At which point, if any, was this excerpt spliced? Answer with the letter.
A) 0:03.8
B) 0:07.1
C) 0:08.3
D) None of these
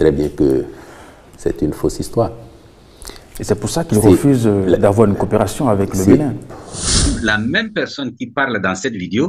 B